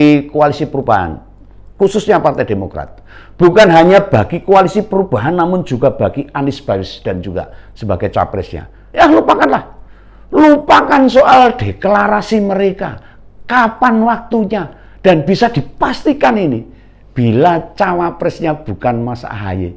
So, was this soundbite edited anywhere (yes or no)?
no